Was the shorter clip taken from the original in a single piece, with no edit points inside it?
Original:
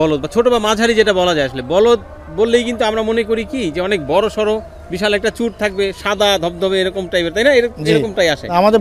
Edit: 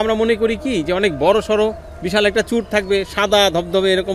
yes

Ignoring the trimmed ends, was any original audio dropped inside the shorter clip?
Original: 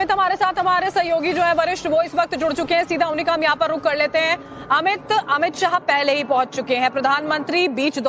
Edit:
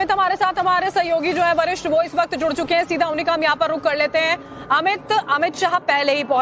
no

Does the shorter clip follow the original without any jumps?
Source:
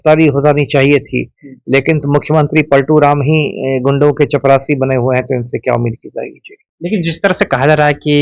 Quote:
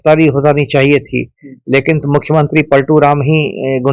yes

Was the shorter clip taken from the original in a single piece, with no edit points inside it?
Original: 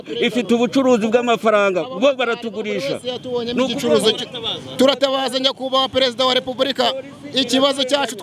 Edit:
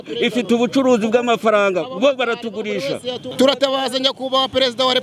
no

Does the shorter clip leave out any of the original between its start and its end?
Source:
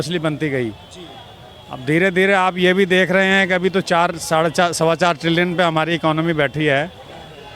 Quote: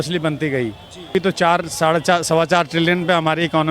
yes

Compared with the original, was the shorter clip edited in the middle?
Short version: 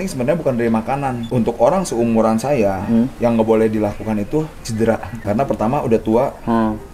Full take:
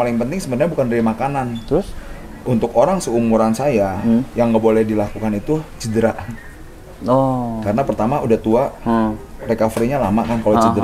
yes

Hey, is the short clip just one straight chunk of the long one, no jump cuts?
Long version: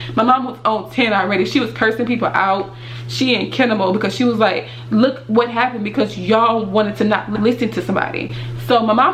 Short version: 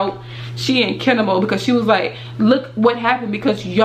yes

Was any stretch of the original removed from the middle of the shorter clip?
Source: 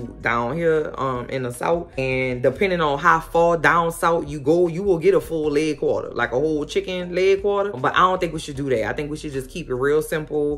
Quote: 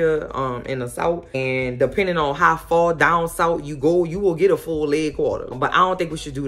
yes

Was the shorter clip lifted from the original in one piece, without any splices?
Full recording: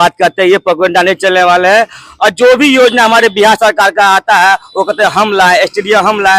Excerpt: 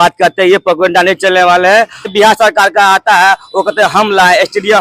no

